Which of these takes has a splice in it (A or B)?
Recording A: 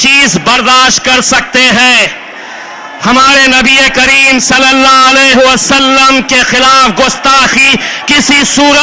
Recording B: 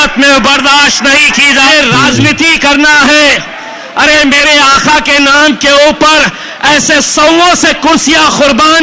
B